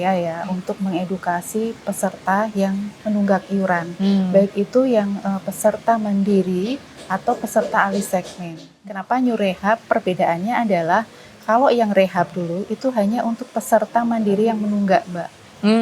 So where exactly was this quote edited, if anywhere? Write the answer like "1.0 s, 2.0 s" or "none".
8.8 s